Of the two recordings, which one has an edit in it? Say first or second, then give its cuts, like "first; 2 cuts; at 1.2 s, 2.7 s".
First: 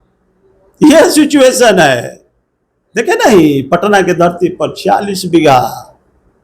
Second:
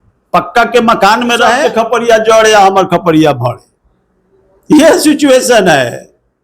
second; 1 cut; at 1.6 s